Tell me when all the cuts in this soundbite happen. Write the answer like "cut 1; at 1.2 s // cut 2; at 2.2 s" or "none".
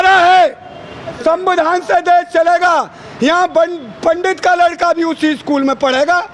cut 1; at 1.2 s